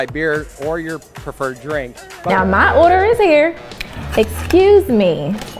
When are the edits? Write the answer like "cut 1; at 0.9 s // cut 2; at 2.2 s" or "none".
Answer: cut 1; at 2.3 s